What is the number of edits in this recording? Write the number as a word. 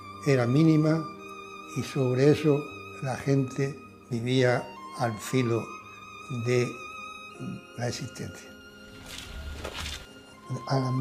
one